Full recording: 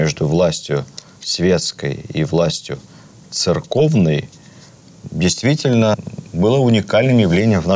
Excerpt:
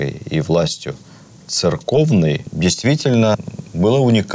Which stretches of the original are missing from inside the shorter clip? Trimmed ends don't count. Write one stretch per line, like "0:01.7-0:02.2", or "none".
0:04.3-0:05.1